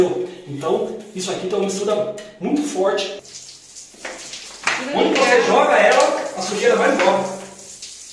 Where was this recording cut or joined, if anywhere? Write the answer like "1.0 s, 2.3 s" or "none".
3.2 s